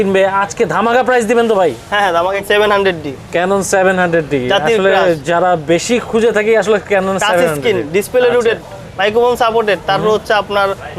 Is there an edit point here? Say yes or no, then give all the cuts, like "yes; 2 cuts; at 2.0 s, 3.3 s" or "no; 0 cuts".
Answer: yes; 1 cut; at 2.4 s